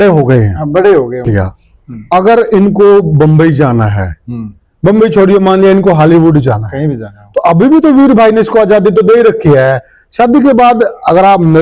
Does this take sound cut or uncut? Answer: cut